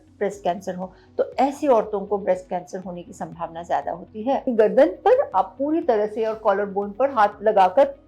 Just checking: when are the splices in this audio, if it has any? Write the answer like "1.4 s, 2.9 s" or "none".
4.4 s